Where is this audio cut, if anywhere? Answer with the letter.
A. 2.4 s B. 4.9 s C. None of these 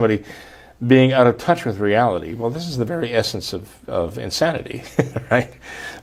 C